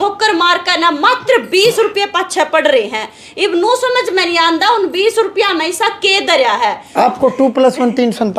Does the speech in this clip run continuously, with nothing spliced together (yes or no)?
no